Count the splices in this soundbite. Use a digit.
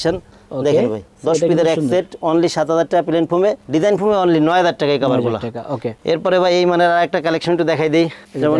0